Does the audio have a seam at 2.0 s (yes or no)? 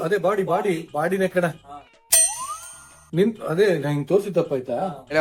yes